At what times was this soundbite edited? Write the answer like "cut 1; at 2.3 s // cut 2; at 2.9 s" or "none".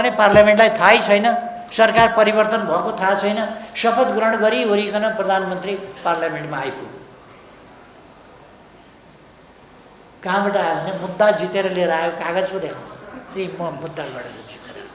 none